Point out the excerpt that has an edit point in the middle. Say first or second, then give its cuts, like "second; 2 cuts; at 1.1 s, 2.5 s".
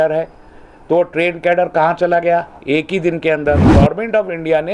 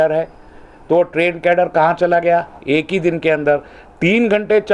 first; 1 cut; at 3.7 s